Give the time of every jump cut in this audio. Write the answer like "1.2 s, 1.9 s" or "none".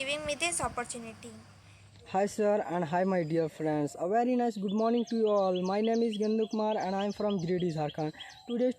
2.0 s